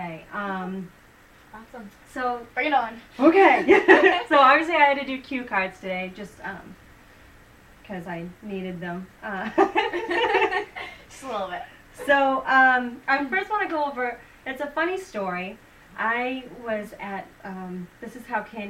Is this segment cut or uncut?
uncut